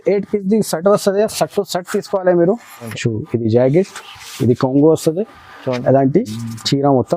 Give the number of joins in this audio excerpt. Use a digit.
1